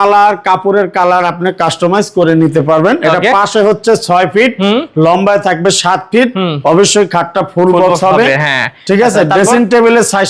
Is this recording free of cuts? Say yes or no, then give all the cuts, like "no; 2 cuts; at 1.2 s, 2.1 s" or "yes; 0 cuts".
yes; 0 cuts